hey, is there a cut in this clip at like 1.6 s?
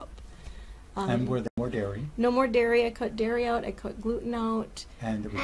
yes; 1 cut; at 1.6 s

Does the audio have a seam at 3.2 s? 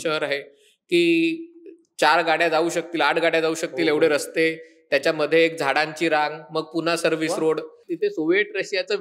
no; 1 cut; at 7.8 s

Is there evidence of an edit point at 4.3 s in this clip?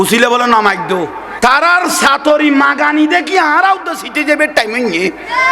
no; 1 cut; at 1.2 s

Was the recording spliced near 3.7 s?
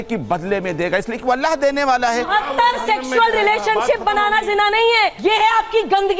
no; 2 cuts; at 2.3 s, 5.1 s

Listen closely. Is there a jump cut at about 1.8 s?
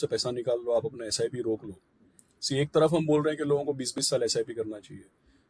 no; 0 cuts

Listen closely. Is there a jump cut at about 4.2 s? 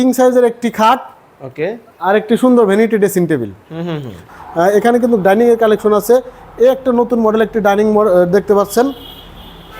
yes; 1 cut; at 4.2 s

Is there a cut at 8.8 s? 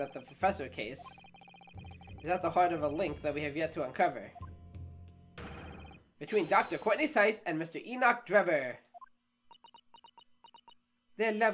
no; 0 cuts

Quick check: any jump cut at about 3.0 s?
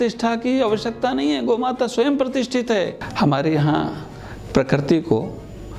yes; 1 cut; at 3.0 s

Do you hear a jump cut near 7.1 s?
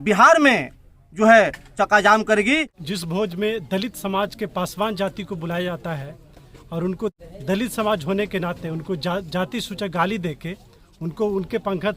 yes; 2 cuts; at 2.7 s, 7.1 s

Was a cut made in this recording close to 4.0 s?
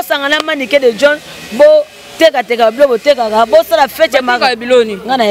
no; 0 cuts

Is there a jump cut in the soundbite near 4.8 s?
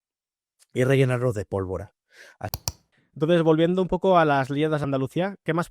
yes; 2 cuts; at 2.5 s, 4.8 s

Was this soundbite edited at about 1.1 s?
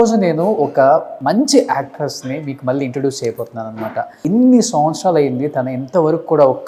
yes; 2 cuts; at 1.1 s, 4.2 s

